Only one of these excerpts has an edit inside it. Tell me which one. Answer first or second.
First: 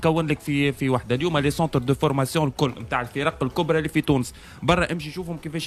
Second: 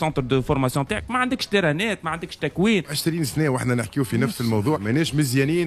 second